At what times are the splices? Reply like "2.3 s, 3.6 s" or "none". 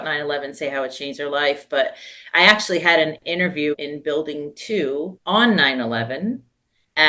3.7 s, 5.2 s